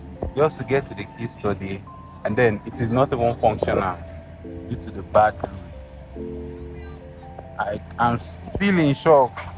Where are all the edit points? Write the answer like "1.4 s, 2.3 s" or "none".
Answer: none